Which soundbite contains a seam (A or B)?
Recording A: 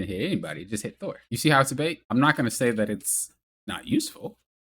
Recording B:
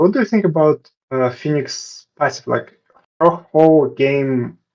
A